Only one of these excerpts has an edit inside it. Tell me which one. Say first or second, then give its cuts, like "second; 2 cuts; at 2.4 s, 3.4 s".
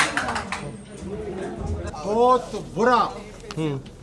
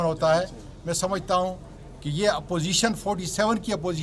first; 1 cut; at 1.9 s